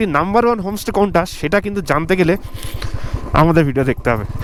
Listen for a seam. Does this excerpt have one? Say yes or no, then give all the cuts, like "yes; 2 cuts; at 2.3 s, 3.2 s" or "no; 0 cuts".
no; 0 cuts